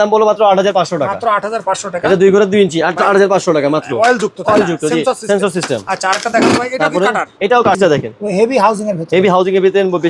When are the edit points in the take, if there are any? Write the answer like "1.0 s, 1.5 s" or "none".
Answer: 7.8 s